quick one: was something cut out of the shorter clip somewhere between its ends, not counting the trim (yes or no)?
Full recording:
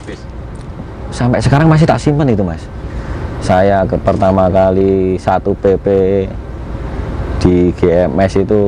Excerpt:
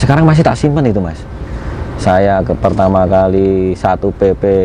no